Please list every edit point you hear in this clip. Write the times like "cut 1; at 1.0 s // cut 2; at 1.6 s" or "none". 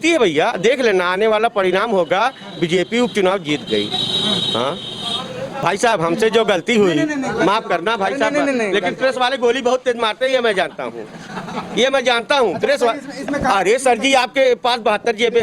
cut 1; at 5.6 s

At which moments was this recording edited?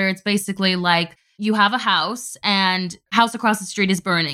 cut 1; at 1.2 s // cut 2; at 2.6 s

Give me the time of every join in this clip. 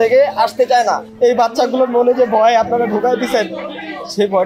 cut 1; at 1.1 s

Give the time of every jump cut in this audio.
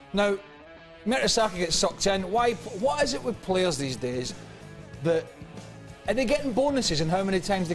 cut 1; at 6.7 s

